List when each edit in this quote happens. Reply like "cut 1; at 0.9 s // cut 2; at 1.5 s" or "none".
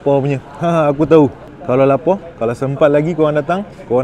none